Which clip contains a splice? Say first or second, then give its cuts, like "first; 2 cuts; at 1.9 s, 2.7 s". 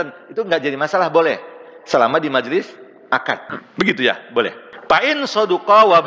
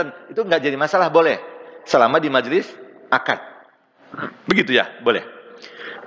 first; 2 cuts; at 3.6 s, 4.7 s